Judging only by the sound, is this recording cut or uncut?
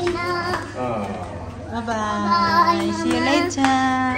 uncut